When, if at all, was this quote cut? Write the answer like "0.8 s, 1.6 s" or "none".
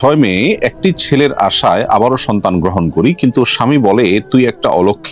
none